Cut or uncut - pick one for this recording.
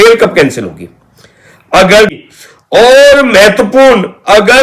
cut